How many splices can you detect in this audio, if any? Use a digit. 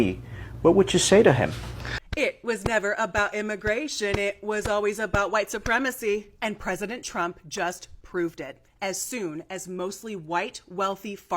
1